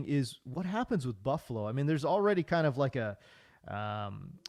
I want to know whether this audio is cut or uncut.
uncut